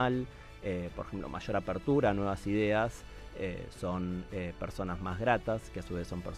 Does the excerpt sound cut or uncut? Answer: uncut